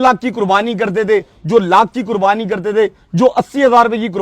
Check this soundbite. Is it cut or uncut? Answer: uncut